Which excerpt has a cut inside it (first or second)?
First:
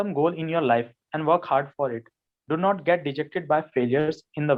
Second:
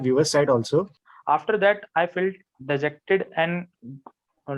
second